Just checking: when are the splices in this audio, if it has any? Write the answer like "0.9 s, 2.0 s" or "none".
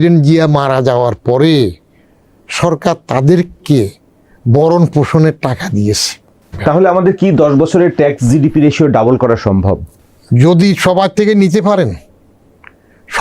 6.5 s